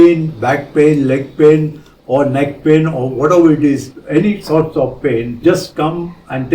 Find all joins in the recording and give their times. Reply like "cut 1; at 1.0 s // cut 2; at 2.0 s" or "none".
cut 1; at 5.4 s